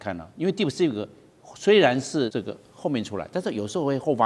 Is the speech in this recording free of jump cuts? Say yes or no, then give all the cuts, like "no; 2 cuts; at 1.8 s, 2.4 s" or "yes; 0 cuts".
no; 1 cut; at 2.3 s